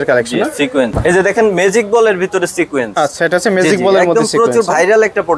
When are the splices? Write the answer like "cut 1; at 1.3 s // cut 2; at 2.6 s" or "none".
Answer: none